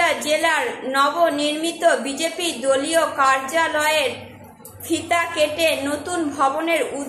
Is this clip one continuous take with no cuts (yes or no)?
yes